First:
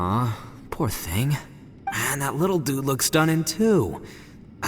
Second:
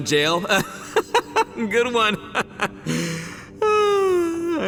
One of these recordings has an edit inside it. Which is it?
first; 1 cut; at 2.0 s

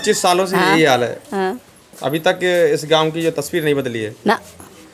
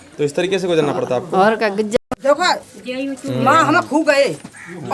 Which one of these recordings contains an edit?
second; 1 cut; at 1.9 s

